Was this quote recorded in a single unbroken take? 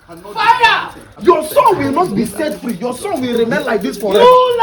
no; 1 cut; at 1.0 s

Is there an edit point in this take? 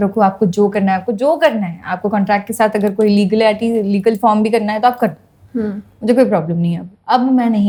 no; 0 cuts

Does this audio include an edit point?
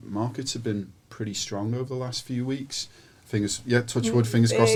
no; 0 cuts

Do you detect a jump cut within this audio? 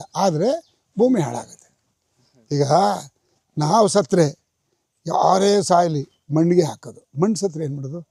no; 0 cuts

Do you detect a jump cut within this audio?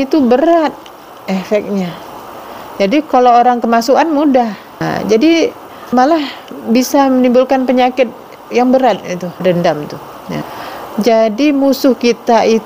yes; 4 cuts; at 4.8 s, 5.9 s, 9.4 s, 10.6 s

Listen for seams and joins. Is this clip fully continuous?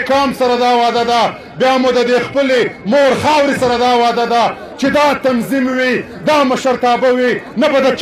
yes; 0 cuts

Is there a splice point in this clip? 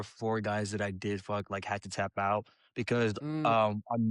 no; 0 cuts

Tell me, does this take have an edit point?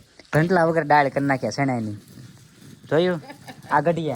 no; 0 cuts

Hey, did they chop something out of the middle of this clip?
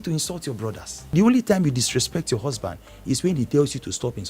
yes; 1 cut; at 1.1 s

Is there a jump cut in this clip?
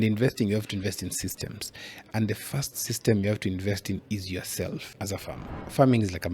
yes; 1 cut; at 5.4 s

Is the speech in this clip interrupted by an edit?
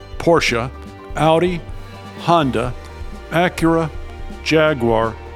no; 0 cuts

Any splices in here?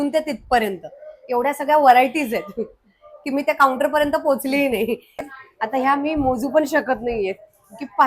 yes; 1 cut; at 5.3 s

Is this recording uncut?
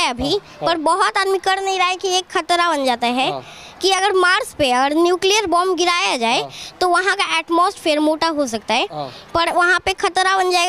yes; 0 cuts

